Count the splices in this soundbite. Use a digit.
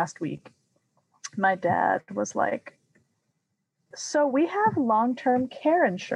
1